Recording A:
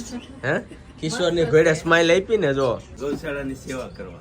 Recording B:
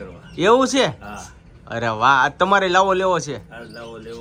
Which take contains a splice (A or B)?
A